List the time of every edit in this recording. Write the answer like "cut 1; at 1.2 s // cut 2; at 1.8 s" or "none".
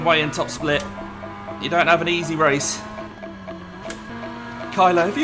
cut 1; at 4.1 s